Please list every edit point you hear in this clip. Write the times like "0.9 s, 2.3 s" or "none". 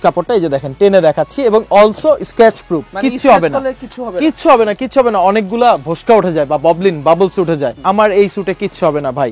none